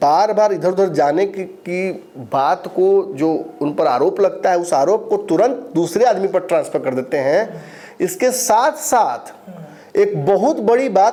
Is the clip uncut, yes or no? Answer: yes